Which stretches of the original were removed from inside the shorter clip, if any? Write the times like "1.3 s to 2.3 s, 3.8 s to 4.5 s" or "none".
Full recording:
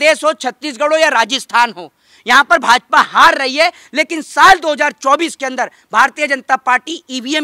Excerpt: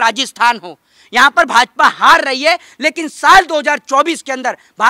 none